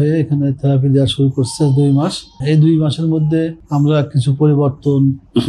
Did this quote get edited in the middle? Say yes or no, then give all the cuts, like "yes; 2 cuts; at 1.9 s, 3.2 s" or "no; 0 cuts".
yes; 2 cuts; at 2.4 s, 3.6 s